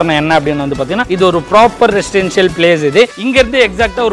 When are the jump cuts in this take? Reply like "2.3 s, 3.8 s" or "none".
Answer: 1.0 s, 3.2 s